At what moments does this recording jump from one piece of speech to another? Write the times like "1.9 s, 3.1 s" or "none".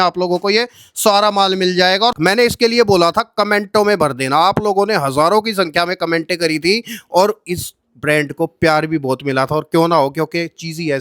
2.2 s